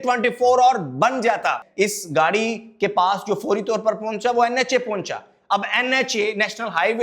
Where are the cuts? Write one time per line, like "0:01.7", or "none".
0:01.6